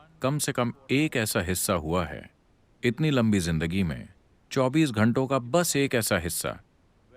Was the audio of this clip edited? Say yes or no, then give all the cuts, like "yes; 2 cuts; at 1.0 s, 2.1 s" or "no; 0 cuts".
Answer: no; 0 cuts